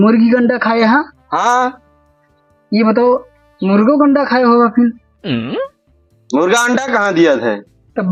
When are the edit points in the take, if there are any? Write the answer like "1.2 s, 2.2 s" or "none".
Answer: none